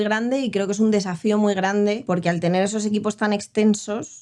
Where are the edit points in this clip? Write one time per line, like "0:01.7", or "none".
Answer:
none